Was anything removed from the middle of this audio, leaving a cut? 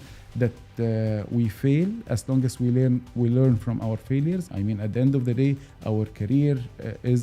yes; 1 cut; at 4.5 s

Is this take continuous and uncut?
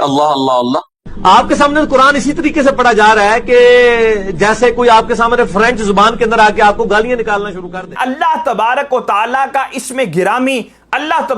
no; 2 cuts; at 0.9 s, 7.9 s

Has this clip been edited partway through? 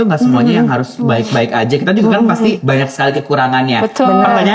yes; 1 cut; at 2.6 s

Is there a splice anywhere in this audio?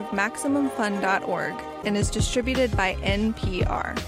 no; 0 cuts

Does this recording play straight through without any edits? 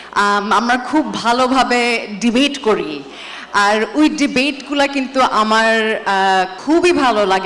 no; 1 cut; at 6.6 s

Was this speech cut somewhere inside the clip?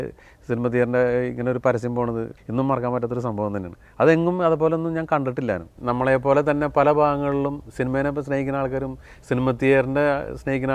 yes; 2 cuts; at 2.3 s, 5.7 s

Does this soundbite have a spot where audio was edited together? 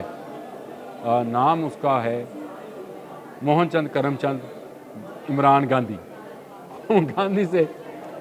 no; 0 cuts

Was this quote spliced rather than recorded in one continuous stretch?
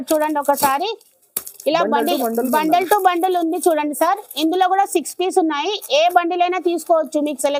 no; 0 cuts

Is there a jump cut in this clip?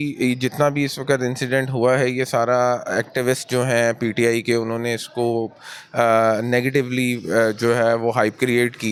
no; 0 cuts

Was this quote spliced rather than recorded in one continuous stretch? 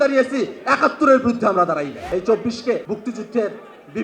yes; 2 cuts; at 2.0 s, 2.8 s

